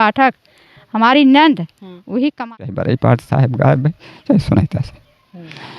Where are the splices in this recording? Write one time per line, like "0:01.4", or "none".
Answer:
0:02.6

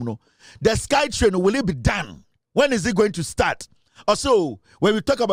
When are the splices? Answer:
none

